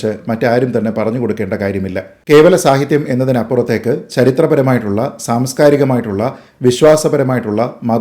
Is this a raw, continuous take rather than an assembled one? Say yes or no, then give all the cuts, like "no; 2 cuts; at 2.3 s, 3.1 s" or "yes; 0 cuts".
no; 1 cut; at 2.1 s